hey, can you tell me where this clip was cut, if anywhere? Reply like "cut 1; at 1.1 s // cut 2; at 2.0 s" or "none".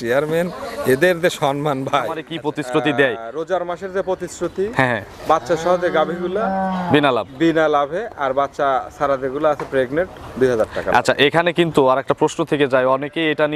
cut 1; at 2.3 s